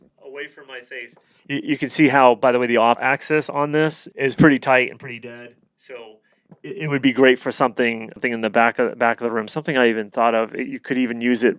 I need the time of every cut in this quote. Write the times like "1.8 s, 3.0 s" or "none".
3.0 s, 4.0 s, 8.2 s